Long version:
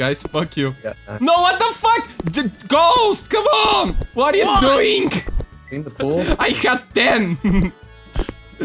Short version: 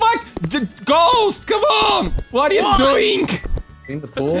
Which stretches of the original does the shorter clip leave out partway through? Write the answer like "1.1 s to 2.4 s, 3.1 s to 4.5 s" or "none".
none